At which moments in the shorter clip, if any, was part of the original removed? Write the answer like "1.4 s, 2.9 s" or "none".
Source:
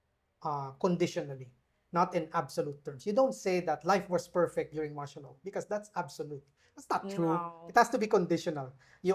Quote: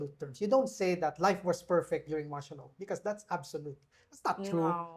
none